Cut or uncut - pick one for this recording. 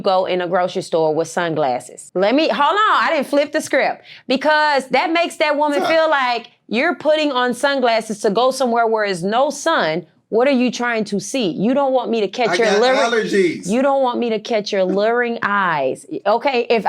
cut